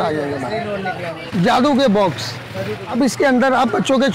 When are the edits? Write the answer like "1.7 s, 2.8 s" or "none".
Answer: 1.1 s, 2.9 s